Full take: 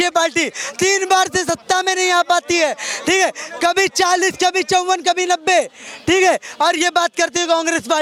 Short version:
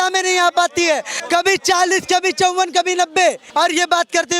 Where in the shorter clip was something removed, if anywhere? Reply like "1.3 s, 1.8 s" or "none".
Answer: 1.1 s, 3.4 s